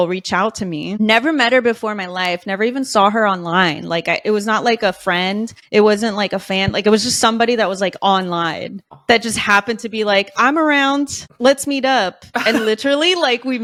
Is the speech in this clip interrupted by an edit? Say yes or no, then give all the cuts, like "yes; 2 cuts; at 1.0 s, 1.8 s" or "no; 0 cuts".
no; 0 cuts